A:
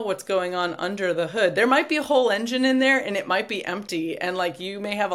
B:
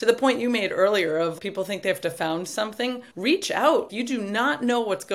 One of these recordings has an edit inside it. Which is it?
B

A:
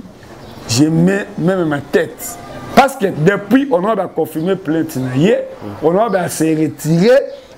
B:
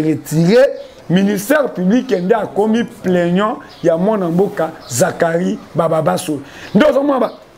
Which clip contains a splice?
A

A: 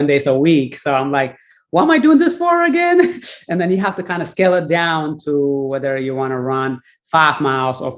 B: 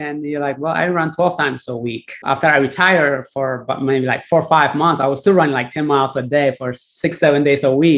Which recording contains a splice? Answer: B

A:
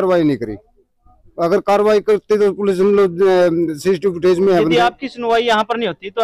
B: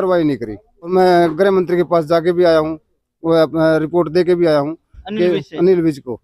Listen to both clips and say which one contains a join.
B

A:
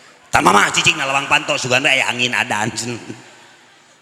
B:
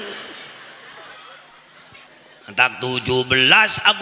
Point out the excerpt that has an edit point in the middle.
B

